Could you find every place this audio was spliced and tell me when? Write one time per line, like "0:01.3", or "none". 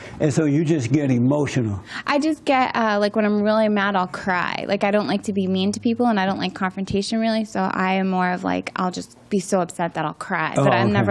none

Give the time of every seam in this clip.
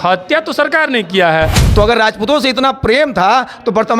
0:01.6

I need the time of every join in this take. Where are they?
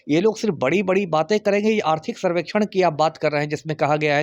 none

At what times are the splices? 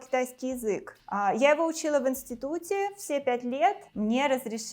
0:03.8

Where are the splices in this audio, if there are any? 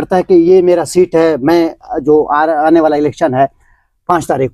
none

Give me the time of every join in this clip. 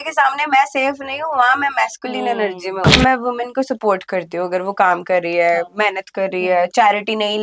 0:03.0

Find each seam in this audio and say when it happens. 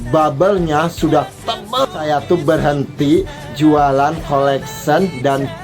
0:01.8

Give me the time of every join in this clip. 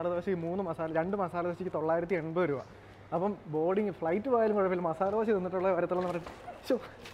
none

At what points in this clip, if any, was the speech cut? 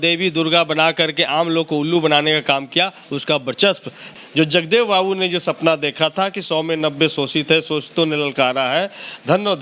0:04.1

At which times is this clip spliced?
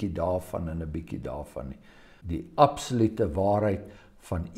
0:02.1

